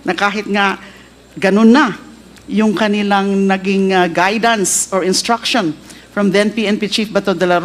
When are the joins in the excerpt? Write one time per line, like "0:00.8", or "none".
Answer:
none

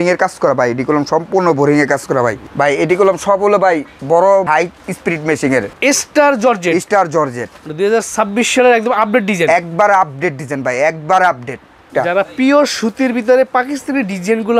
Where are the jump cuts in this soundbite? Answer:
0:02.4
0:04.5
0:05.7
0:11.9

